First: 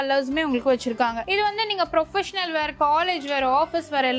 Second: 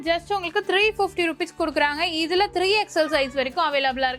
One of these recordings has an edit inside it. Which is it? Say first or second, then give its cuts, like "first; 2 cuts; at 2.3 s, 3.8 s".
first; 1 cut; at 1.2 s